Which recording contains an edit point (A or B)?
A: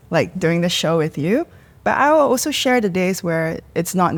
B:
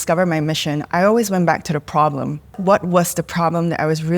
B